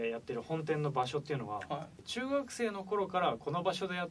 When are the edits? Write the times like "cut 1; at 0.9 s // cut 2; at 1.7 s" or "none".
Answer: cut 1; at 2.1 s